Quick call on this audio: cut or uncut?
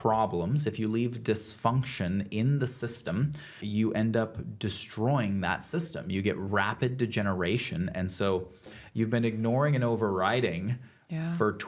cut